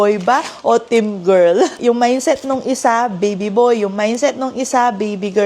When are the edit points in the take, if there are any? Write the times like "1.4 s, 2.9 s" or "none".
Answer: 1.8 s